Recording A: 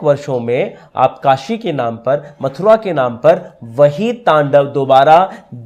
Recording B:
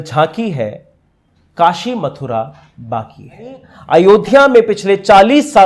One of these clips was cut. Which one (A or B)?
B